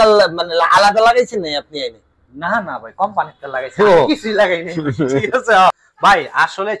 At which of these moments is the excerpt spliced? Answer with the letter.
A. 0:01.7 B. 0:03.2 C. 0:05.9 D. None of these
C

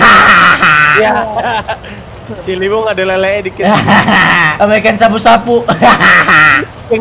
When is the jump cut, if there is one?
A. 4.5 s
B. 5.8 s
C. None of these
A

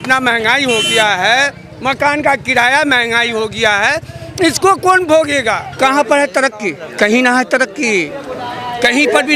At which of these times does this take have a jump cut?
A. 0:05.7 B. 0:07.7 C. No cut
A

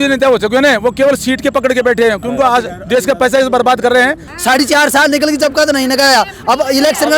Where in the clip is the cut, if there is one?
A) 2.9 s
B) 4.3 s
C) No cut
B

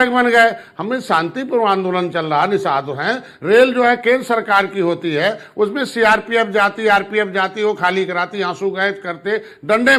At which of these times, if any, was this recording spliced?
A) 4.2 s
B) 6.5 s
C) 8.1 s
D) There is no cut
D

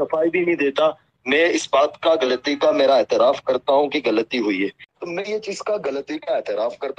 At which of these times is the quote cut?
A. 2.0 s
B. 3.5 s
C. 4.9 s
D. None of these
C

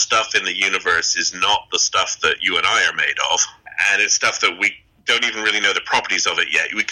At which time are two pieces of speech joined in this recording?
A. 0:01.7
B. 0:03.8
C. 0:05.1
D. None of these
D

